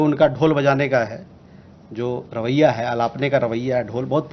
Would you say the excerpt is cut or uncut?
uncut